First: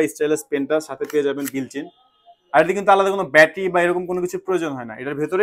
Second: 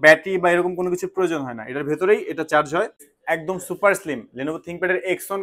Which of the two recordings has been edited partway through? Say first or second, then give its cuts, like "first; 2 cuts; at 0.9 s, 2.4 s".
second; 1 cut; at 3.1 s